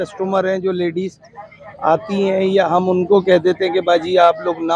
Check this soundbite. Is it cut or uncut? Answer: uncut